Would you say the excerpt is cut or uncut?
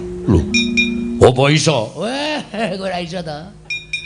cut